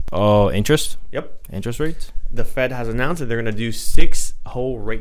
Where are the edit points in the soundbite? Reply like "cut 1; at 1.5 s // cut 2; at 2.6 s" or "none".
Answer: none